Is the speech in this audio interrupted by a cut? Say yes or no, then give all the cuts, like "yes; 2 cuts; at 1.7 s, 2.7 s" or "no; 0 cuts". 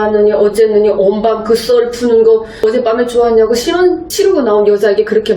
yes; 1 cut; at 2.6 s